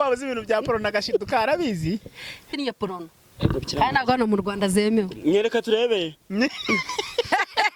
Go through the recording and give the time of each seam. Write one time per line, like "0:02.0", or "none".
0:02.5